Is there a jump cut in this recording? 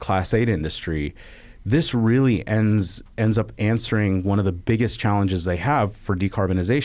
no; 0 cuts

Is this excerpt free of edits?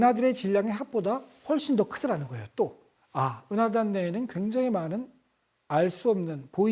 yes; 0 cuts

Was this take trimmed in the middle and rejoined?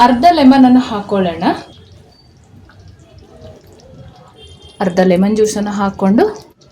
yes; 1 cut; at 1.8 s

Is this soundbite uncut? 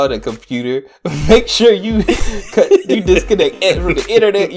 yes; 0 cuts

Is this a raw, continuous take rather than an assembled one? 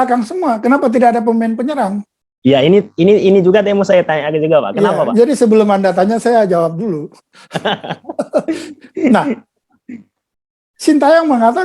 yes; 0 cuts

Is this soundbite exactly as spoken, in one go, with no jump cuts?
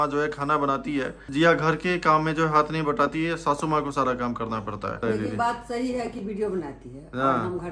no; 2 cuts; at 1.2 s, 5.0 s

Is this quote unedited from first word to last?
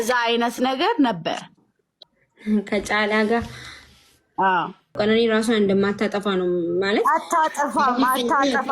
no; 1 cut; at 5.0 s

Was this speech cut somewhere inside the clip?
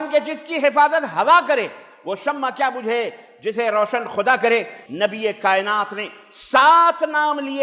yes; 1 cut; at 4.8 s

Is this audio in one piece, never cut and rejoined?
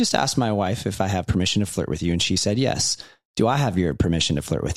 yes; 0 cuts

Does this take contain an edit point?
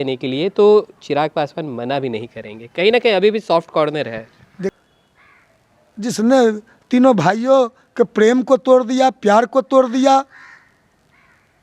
yes; 1 cut; at 4.8 s

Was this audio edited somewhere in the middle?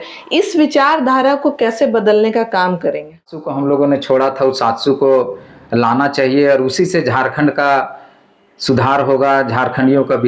yes; 1 cut; at 3.5 s

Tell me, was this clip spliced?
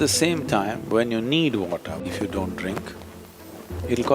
yes; 1 cut; at 2.1 s

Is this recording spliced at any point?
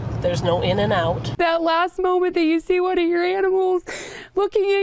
yes; 1 cut; at 1.3 s

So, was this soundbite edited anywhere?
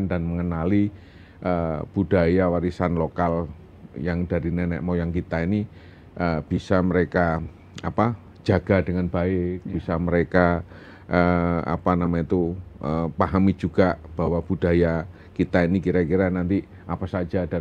no; 0 cuts

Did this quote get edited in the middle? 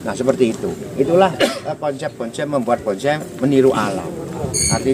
no; 0 cuts

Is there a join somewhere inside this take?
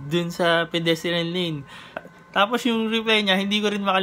no; 0 cuts

